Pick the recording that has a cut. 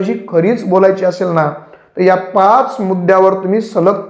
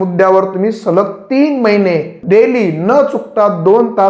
second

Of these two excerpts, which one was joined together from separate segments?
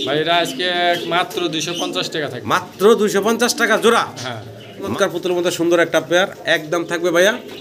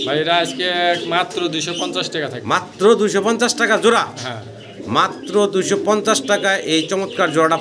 first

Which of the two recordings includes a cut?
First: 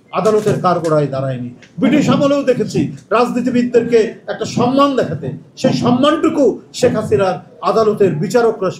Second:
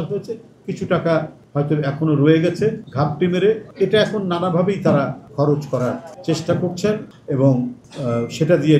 second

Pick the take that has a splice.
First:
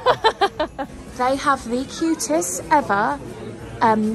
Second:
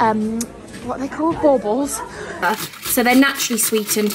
second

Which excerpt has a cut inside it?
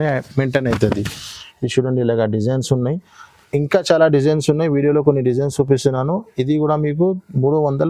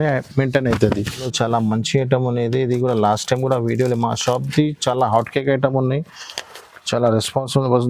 second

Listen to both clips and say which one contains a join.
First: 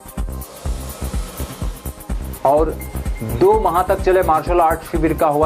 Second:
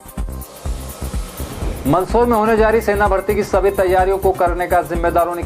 second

